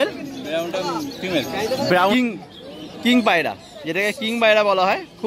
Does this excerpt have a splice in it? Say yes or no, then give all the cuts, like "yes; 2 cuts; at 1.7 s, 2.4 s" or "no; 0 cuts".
yes; 1 cut; at 2.1 s